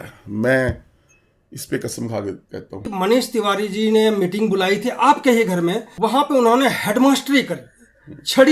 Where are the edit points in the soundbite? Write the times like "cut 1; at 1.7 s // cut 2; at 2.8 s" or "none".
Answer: cut 1; at 3.0 s // cut 2; at 6.2 s

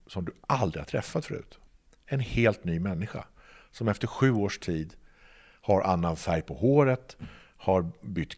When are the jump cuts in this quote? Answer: cut 1; at 1.5 s

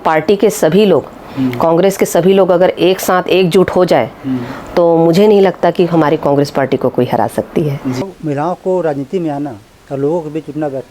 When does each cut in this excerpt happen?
cut 1; at 8.0 s

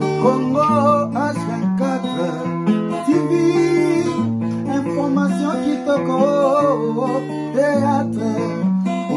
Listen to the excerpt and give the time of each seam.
none

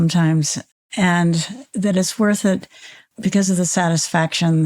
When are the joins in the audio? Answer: cut 1; at 1.6 s // cut 2; at 3.1 s

